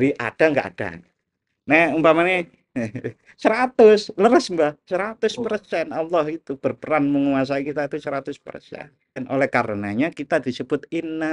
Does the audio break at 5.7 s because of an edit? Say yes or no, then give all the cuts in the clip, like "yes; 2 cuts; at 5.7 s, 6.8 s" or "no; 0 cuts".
no; 1 cut; at 9.2 s